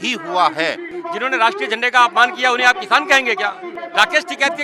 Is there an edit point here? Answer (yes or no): yes